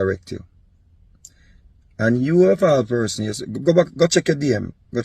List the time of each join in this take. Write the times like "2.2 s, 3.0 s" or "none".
none